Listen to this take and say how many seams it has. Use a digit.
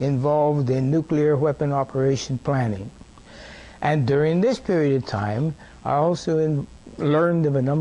1